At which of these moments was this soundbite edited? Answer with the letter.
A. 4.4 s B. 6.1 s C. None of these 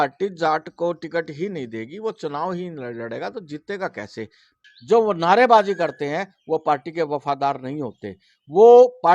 A